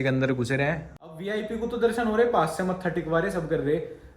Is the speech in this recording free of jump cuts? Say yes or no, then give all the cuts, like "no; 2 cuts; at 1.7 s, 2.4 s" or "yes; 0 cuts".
no; 1 cut; at 0.9 s